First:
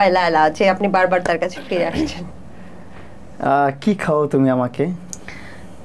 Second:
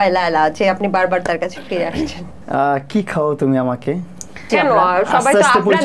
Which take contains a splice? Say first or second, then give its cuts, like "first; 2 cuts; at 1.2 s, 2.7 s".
second; 2 cuts; at 2.3 s, 4.4 s